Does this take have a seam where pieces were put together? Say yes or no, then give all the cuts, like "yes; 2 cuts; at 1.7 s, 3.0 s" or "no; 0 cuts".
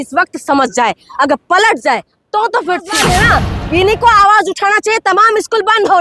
yes; 1 cut; at 2.9 s